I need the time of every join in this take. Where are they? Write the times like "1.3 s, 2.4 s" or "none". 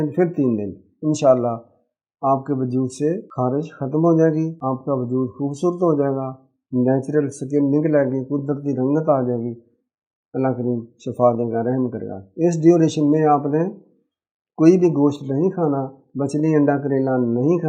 3.3 s, 4.6 s

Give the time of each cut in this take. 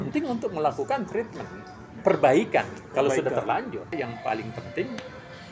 4.0 s

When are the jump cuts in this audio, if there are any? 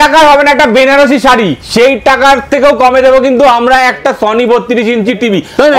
none

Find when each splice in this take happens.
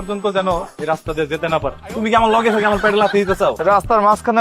1.8 s, 3.6 s

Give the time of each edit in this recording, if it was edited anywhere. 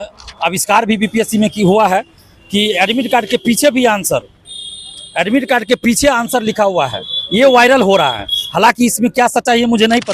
none

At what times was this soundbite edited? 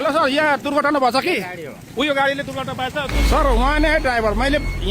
3.2 s

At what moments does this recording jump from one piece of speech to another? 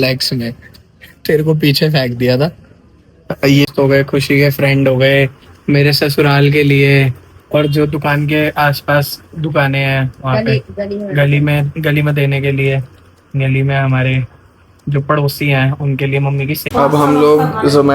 3.7 s, 16.6 s

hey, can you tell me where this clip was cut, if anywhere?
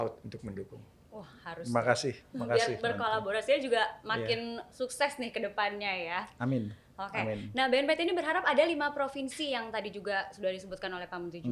none

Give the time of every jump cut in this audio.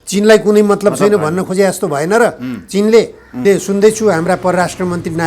3.4 s

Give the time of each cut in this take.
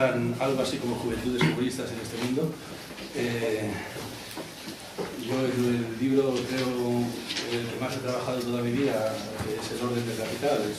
8.6 s

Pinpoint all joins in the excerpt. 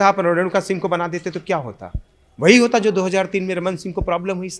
none

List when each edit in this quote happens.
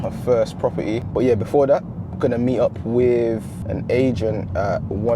1.0 s, 3.6 s

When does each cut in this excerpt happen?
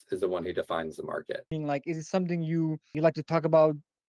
1.5 s, 2.9 s

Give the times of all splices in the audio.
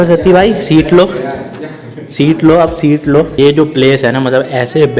3.3 s

